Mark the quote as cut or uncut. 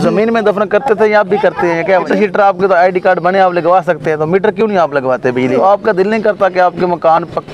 cut